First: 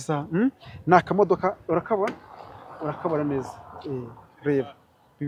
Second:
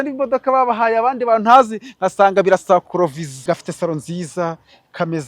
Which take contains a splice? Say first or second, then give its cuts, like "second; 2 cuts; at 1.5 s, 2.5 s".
second; 1 cut; at 3.3 s